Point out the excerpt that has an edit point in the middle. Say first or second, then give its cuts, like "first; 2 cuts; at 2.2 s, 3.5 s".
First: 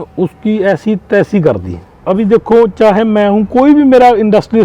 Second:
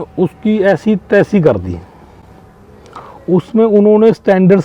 first; 1 cut; at 1.9 s